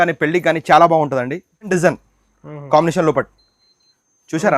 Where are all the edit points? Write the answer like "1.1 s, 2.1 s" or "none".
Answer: 1.7 s